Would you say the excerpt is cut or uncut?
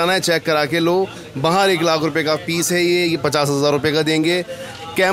uncut